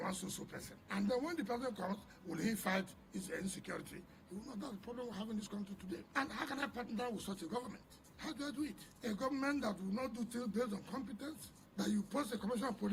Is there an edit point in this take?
no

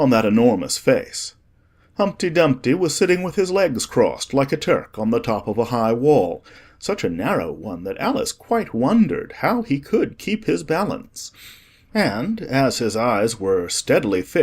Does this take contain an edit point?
yes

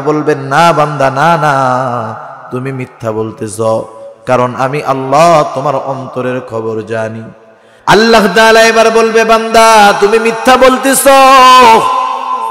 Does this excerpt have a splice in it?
yes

